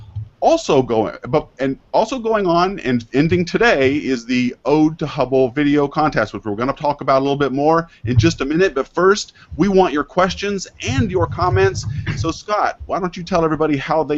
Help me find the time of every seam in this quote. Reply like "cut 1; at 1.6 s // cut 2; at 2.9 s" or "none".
cut 1; at 11.4 s